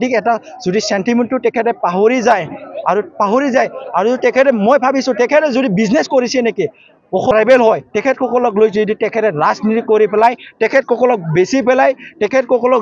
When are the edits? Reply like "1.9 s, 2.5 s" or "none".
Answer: 7.3 s